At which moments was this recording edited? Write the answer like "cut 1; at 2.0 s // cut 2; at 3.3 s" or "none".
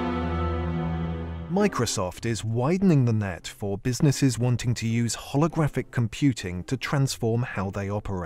none